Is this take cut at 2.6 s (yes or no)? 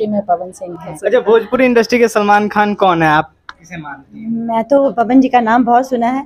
no